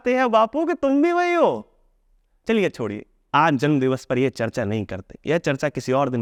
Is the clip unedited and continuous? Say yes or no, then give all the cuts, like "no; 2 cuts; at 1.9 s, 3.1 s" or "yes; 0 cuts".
yes; 0 cuts